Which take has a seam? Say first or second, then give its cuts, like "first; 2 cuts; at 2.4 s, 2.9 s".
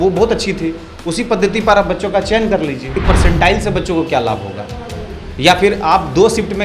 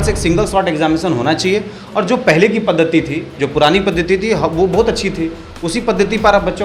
first; 1 cut; at 3.0 s